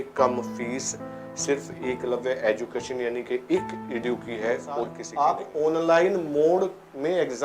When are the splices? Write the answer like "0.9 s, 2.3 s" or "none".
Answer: 5.0 s